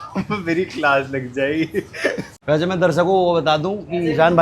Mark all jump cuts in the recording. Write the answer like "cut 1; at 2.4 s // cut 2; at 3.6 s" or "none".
cut 1; at 2.3 s